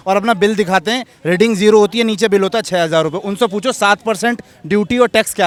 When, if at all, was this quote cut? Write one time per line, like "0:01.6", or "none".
none